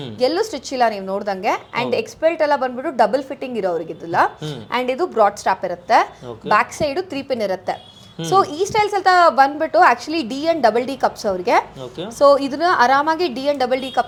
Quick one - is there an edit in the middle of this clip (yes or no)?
no